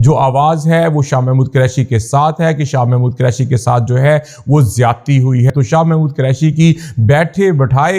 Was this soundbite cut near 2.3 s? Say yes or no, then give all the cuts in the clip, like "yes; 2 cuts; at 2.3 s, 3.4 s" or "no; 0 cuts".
no; 1 cut; at 5.5 s